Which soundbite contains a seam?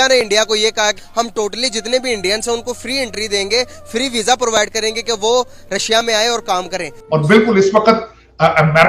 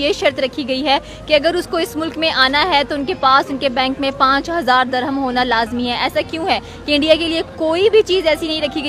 first; 2 cuts; at 1.0 s, 7.0 s

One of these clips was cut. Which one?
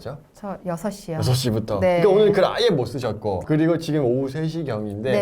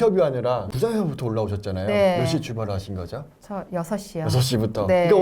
first; 1 cut; at 3.4 s

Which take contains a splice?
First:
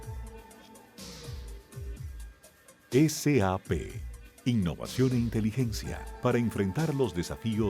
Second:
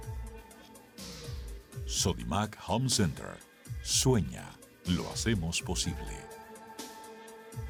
first; 1 cut; at 1.9 s

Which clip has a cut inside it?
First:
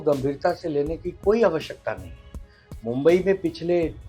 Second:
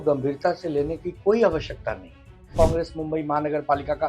second; 1 cut; at 2.5 s

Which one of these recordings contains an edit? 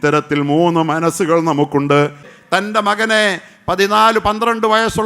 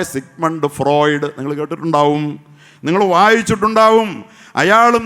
first; 1 cut; at 2.3 s

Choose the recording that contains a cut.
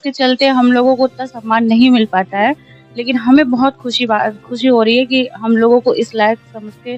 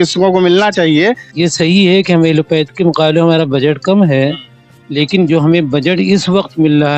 second; 1 cut; at 1.3 s

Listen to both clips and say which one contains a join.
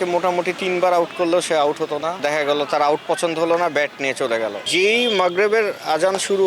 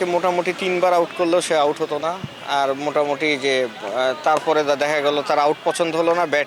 first; 2 cuts; at 2.2 s, 4.7 s

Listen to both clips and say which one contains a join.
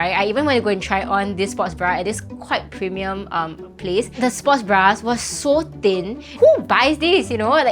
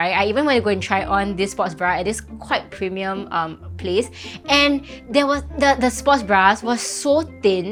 first; 2 cuts; at 4.2 s, 6.3 s

